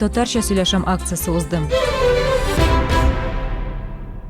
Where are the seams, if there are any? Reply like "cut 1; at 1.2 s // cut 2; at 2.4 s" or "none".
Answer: cut 1; at 1.6 s